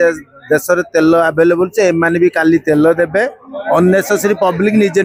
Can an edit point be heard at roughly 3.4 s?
no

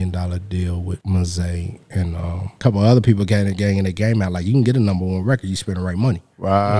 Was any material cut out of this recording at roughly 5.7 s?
no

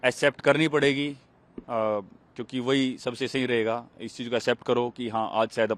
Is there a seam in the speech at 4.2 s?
no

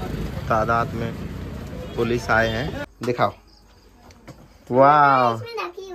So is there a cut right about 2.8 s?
yes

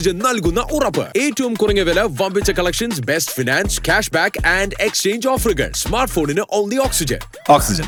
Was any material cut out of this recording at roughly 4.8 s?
no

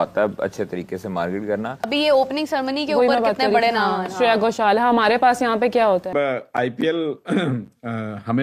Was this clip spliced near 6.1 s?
yes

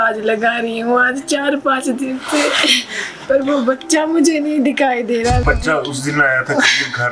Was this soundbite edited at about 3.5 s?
no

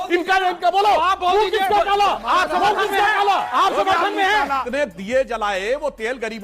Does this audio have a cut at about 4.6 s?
yes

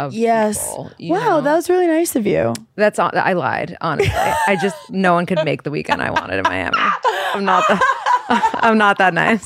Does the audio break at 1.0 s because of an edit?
no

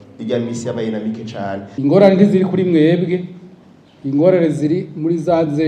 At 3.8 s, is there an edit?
no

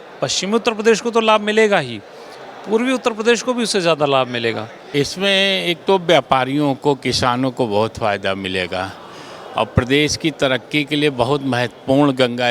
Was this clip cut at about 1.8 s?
no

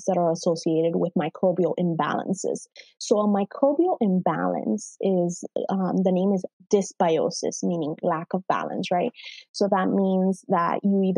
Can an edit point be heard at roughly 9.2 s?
no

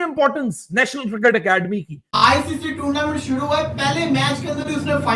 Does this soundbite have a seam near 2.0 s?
yes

